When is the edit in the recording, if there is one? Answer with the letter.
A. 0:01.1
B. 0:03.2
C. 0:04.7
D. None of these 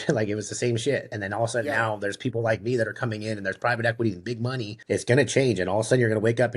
C